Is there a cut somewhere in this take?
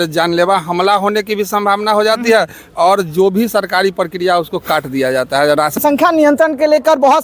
yes; 1 cut; at 5.8 s

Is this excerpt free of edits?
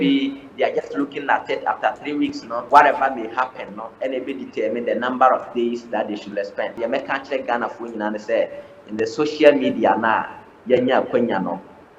no; 2 cuts; at 2.5 s, 6.7 s

